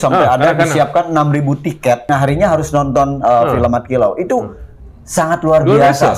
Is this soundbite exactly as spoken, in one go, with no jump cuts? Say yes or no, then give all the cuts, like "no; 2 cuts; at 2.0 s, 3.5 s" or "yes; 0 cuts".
no; 1 cut; at 2.1 s